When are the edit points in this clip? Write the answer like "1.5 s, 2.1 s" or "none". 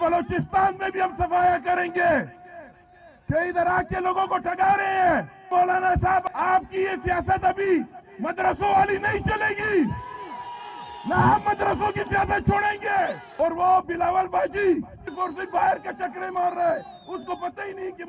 5.5 s, 6.2 s, 13.2 s, 15.0 s